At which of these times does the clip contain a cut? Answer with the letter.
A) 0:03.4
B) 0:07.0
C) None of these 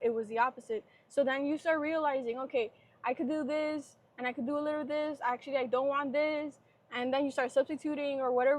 C